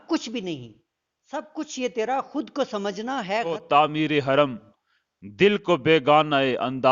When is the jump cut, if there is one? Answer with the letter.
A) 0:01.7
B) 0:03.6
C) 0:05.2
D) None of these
B